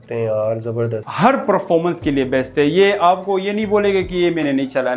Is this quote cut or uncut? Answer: cut